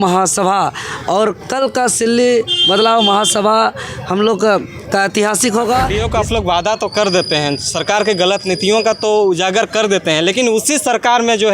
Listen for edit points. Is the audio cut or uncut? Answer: cut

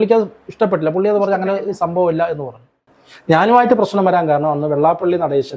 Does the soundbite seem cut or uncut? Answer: cut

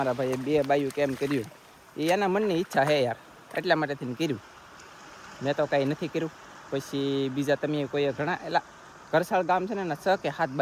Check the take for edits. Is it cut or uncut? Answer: uncut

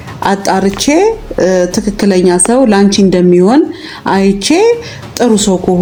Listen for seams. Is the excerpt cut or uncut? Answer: uncut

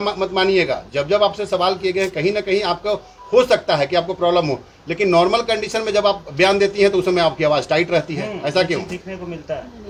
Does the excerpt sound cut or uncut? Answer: uncut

